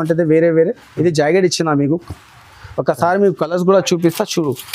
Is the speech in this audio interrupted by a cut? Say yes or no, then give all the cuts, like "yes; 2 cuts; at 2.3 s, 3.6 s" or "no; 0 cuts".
no; 0 cuts